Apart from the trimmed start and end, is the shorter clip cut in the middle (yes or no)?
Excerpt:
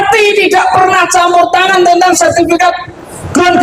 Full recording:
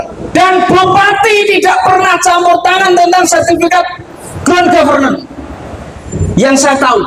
no